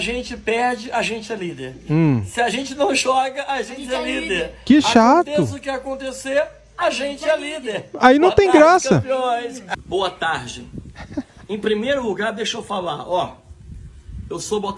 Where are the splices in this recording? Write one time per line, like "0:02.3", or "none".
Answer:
none